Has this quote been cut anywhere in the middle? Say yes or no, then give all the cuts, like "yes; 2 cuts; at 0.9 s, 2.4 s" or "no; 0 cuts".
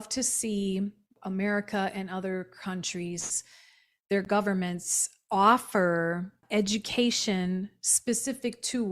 yes; 2 cuts; at 1.1 s, 6.4 s